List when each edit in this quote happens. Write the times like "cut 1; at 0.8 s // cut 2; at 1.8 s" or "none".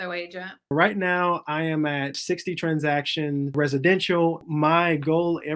cut 1; at 0.7 s // cut 2; at 2.2 s // cut 3; at 3.5 s // cut 4; at 4.5 s

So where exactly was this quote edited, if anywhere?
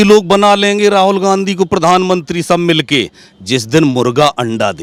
none

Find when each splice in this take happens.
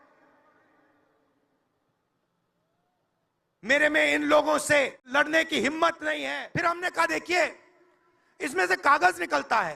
cut 1; at 5.0 s // cut 2; at 6.3 s

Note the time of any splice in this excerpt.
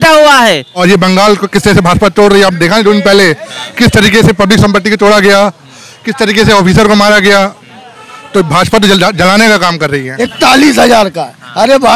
cut 1; at 0.8 s // cut 2; at 10.3 s

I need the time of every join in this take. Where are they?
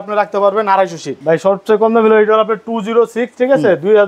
cut 1; at 1.1 s

